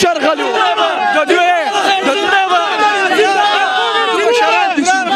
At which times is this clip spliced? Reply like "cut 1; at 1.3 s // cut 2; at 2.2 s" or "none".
none